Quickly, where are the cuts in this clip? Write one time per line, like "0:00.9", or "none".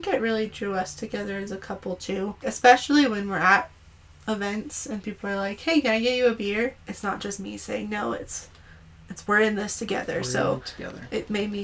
0:02.4
0:06.9